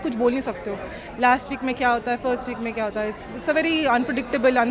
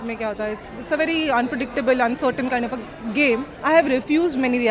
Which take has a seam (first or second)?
second